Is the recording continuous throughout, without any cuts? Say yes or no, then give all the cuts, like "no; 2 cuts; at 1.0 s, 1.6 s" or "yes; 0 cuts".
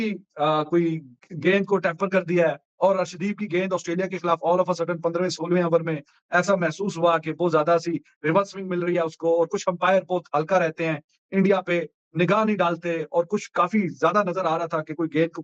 yes; 0 cuts